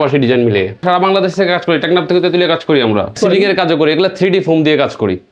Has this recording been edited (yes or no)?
yes